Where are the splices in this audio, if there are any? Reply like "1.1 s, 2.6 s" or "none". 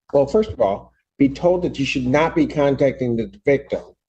1.4 s